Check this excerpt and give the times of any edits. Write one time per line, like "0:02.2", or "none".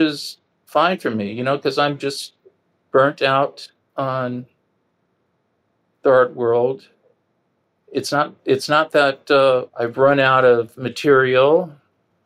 none